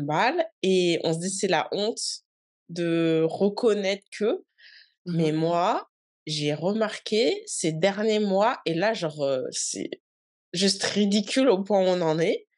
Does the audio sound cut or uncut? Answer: uncut